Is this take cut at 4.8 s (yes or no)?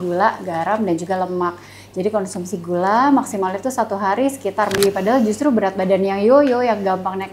yes